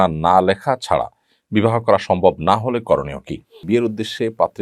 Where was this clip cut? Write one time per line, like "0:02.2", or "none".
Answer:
0:03.6